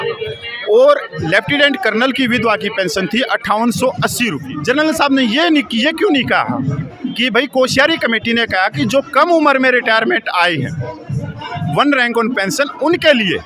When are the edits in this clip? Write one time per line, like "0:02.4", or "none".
0:04.5